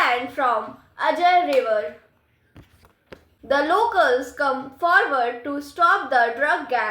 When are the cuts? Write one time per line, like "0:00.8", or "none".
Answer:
0:03.3